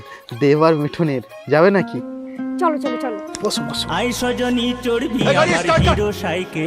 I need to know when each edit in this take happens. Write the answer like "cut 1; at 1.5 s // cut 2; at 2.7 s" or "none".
cut 1; at 2.2 s